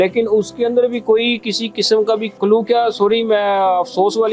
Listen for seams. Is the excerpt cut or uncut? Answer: cut